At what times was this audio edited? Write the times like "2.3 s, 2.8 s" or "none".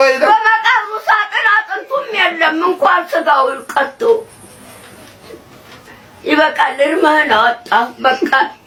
none